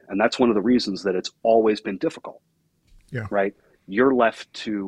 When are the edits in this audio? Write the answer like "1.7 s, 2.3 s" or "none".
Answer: none